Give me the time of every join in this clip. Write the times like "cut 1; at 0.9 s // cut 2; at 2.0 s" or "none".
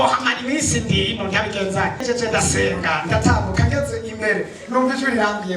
cut 1; at 2.0 s